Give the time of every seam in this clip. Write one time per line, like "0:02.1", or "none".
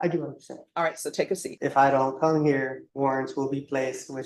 0:01.5
0:02.8